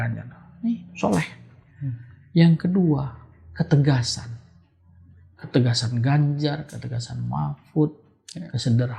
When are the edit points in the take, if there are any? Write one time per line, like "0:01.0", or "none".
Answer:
none